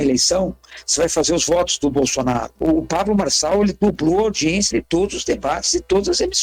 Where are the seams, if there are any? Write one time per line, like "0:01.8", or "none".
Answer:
0:02.5

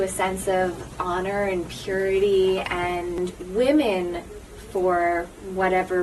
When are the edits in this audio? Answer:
0:03.2

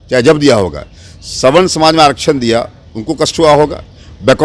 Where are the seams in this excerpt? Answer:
none

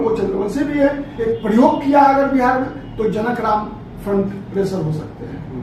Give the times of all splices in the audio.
0:01.1

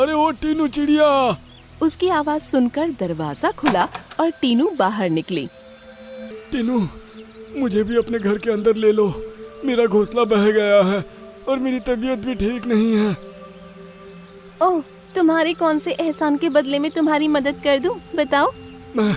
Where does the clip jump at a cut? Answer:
0:06.3

